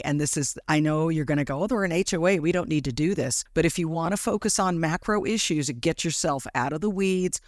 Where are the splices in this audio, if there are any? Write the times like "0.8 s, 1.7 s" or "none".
3.4 s